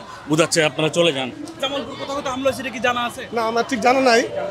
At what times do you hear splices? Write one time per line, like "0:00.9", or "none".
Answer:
0:01.6